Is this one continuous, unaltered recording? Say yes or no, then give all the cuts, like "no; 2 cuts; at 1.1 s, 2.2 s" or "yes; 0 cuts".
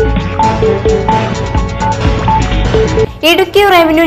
no; 1 cut; at 2.9 s